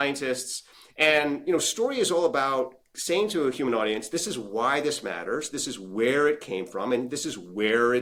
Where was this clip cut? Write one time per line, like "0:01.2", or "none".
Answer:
none